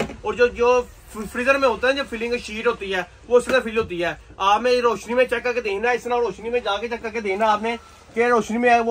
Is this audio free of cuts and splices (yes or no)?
yes